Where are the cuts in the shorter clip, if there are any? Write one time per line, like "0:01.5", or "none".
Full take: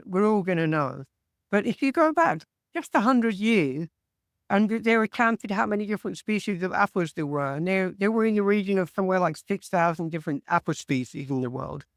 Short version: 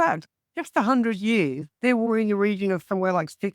0:02.1